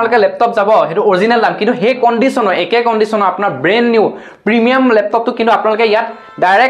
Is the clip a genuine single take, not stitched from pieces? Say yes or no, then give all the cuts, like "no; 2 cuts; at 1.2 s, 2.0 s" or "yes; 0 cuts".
yes; 0 cuts